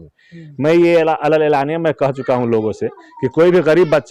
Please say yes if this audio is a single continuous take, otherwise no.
yes